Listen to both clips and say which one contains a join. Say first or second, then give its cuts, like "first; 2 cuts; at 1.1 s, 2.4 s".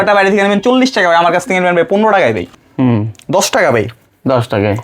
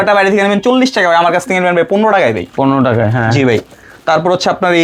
first; 1 cut; at 2.5 s